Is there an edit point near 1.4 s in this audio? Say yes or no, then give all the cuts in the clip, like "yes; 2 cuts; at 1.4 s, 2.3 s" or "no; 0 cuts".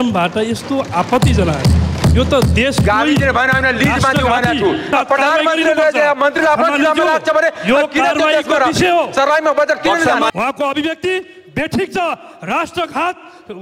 no; 2 cuts; at 4.9 s, 10.3 s